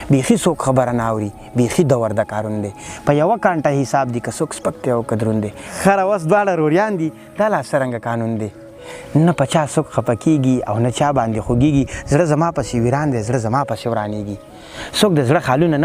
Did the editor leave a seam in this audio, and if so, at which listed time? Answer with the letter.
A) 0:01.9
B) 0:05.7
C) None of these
B